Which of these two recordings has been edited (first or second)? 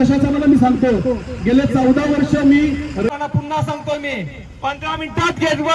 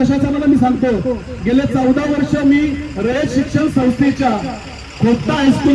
first